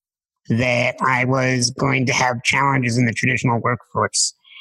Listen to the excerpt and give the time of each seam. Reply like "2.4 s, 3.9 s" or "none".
none